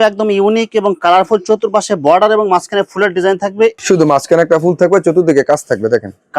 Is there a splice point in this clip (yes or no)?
yes